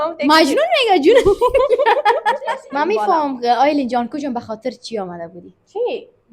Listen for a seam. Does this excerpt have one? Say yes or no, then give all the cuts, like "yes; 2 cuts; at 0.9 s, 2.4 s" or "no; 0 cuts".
yes; 1 cut; at 2.4 s